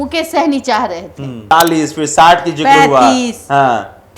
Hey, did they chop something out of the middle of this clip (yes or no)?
yes